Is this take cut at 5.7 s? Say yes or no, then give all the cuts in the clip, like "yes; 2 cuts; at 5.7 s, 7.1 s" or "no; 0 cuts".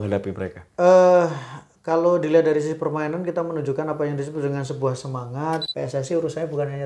yes; 1 cut; at 5.7 s